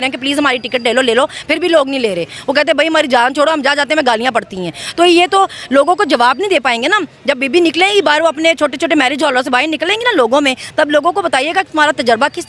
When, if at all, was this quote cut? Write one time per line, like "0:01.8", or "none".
none